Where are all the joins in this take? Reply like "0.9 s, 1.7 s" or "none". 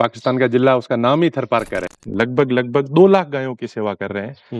2.0 s